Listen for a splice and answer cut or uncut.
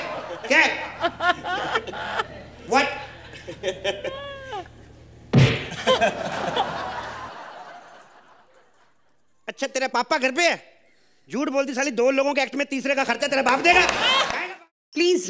cut